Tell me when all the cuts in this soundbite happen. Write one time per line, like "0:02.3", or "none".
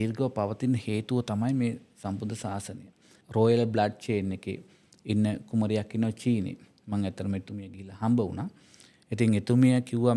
0:03.2